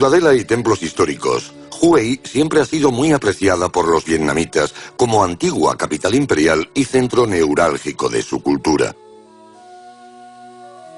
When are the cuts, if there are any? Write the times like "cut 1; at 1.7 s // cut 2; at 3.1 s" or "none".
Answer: none